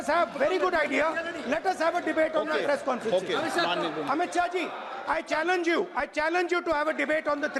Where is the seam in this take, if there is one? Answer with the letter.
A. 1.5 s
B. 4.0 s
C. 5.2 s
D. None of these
D